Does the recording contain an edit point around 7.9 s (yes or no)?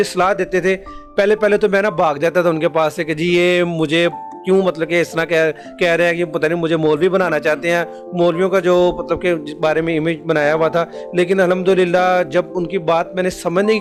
no